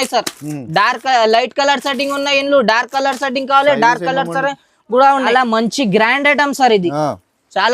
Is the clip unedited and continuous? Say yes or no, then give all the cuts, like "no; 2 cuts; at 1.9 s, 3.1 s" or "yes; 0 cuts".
no; 1 cut; at 5.2 s